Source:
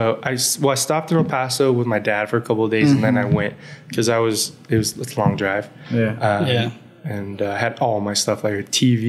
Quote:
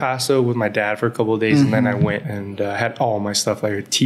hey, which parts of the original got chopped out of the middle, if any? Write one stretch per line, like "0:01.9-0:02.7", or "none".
0:03.7-0:07.2